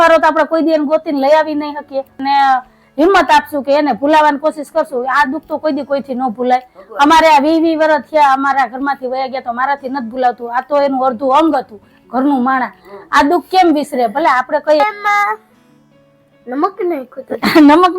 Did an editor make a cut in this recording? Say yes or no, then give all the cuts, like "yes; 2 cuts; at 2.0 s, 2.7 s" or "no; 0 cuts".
yes; 2 cuts; at 2.2 s, 14.8 s